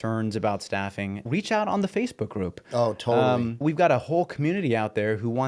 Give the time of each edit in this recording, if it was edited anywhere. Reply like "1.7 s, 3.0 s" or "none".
1.3 s, 3.6 s